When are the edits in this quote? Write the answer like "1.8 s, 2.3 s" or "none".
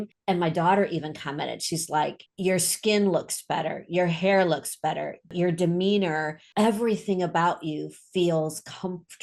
none